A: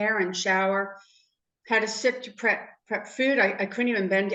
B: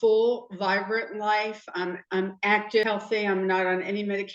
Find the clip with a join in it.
B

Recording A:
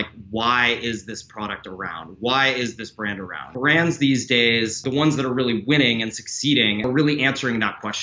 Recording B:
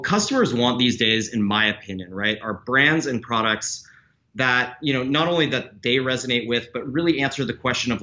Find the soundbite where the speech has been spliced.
A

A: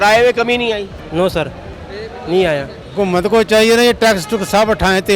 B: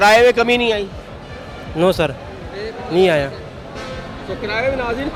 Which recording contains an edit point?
A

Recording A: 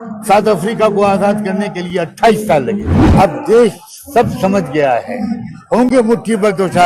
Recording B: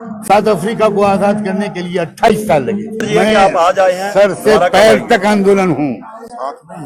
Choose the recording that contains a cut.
A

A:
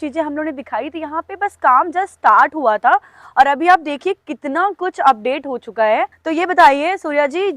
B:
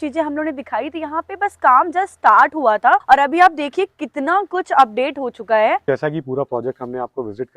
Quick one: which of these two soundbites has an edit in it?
B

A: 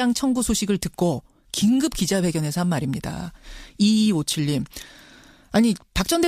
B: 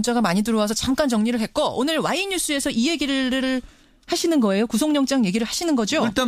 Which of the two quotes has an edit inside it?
B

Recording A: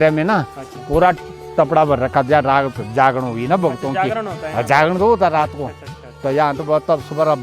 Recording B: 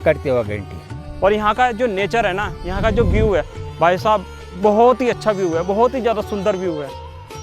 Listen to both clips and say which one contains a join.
B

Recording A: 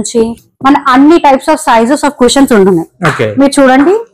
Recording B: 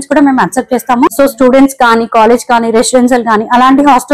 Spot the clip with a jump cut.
B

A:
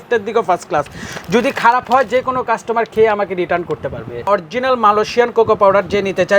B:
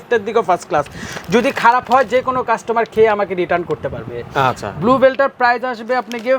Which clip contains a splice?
A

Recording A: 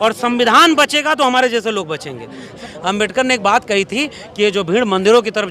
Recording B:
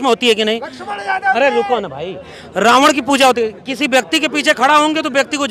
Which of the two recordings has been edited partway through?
A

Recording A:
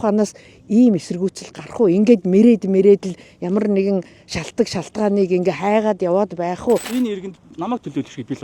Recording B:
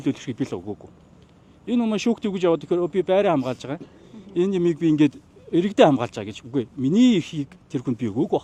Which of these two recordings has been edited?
A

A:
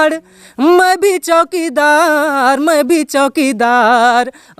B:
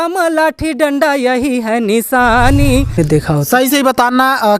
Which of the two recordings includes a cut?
B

